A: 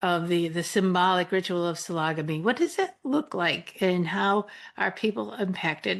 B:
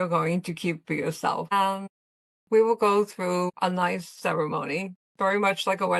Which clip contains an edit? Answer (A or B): B